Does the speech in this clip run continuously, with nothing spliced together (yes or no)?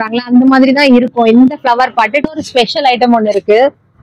no